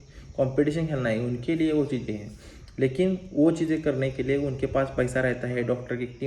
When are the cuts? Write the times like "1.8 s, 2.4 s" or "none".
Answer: none